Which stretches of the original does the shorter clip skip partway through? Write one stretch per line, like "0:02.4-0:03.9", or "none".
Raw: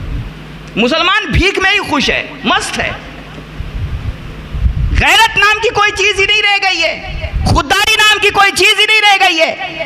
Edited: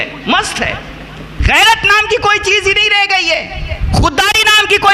0:03.5-0:04.9

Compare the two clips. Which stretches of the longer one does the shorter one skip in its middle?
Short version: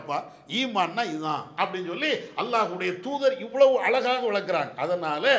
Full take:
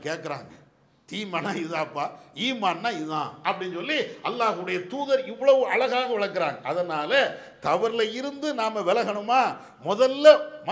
none

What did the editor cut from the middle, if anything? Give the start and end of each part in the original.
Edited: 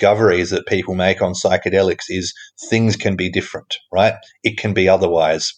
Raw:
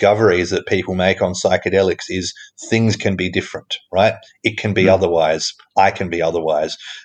none

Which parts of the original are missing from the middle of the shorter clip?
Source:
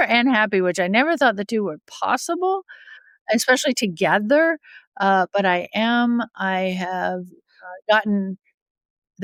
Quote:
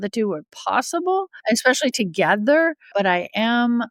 0:02.7-0:03.2
0:04.7-0:05.3

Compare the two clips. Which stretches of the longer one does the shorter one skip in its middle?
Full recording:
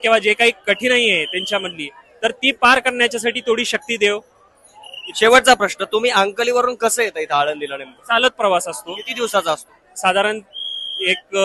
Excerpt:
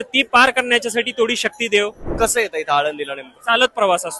0:04.4-0:06.8

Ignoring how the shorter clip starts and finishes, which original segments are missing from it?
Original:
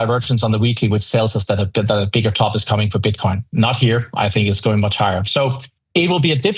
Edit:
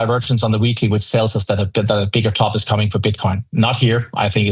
none

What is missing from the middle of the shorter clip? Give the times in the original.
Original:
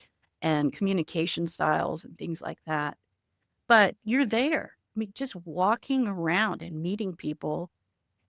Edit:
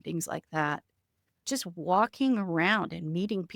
0:03.6-0:05.1

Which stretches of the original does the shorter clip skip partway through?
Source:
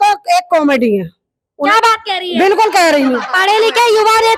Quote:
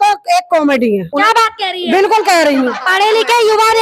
0:01.1-0:01.5

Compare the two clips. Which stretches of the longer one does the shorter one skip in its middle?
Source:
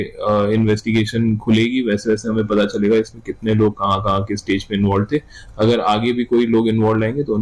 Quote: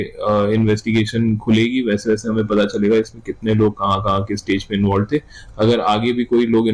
none

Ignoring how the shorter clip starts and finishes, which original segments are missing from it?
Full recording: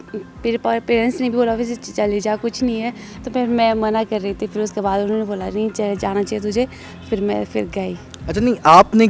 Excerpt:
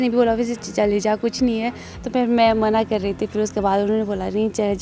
none

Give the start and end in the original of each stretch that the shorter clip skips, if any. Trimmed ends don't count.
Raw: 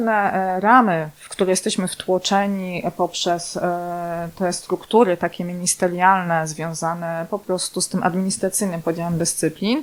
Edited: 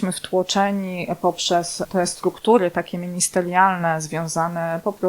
0:03.6-0:04.3

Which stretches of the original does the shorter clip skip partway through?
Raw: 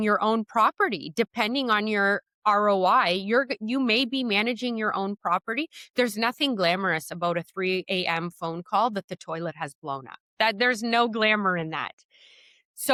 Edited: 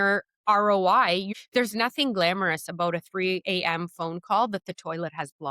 0:03.3-0:05.7

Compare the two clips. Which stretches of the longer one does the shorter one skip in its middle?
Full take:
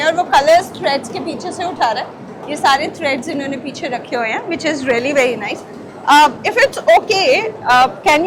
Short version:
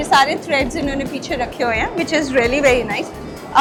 none

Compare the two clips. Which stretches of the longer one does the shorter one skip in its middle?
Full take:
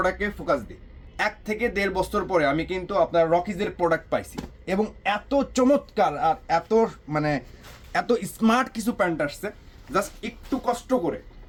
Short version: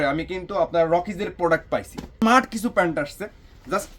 0:04.5-0:08.4

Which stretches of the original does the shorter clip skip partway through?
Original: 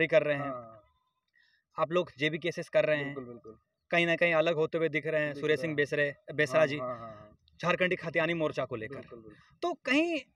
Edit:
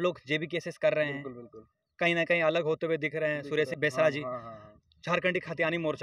0:05.6-0:06.3

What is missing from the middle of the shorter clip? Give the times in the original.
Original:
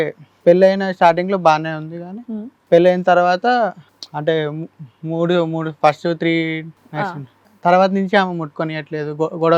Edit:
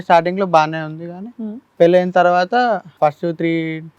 0:03.8-0:05.7

